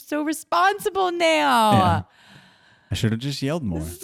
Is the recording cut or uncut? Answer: uncut